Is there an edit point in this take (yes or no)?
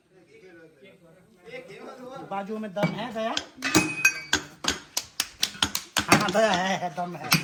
no